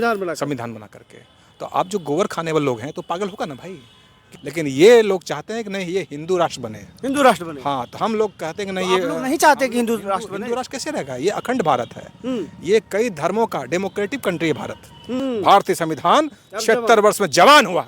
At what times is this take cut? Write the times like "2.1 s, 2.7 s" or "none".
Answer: 4.4 s, 15.2 s